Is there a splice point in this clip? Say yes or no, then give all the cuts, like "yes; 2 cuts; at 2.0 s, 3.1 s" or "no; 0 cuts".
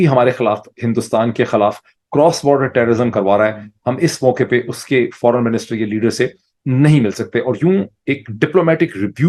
no; 0 cuts